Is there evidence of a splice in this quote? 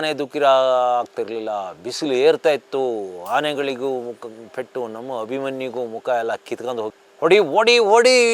yes; 1 cut; at 6.9 s

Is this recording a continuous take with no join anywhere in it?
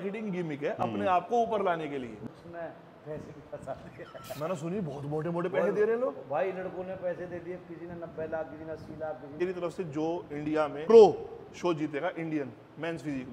no; 3 cuts; at 2.1 s, 9.4 s, 10.8 s

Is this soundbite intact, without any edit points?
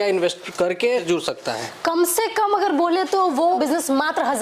no; 2 cuts; at 1.0 s, 3.6 s

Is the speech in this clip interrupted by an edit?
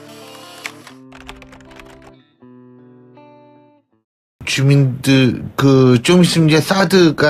no; 0 cuts

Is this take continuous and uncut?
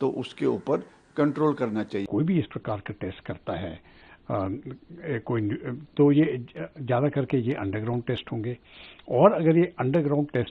no; 1 cut; at 2.1 s

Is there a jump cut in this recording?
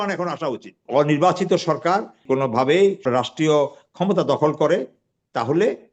yes; 3 cuts; at 0.8 s, 2.2 s, 3.0 s

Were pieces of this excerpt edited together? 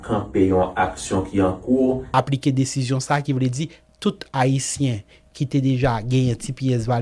yes; 1 cut; at 2.0 s

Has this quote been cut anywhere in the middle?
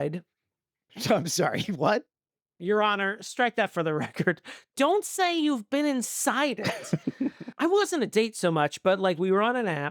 yes; 1 cut; at 7.5 s

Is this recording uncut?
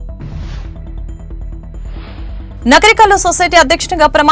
no; 1 cut; at 2.5 s

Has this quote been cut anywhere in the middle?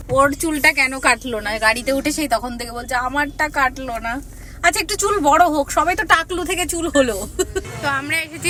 no; 0 cuts

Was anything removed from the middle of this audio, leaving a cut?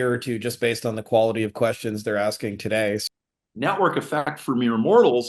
yes; 1 cut; at 3.0 s

